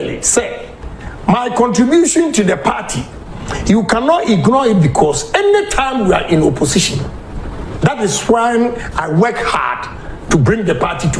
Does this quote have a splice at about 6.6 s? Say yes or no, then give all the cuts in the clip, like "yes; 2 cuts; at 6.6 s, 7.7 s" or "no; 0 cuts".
no; 0 cuts